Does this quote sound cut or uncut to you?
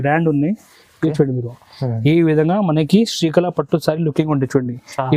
uncut